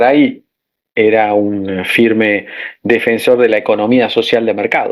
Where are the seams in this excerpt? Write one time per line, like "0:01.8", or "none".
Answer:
none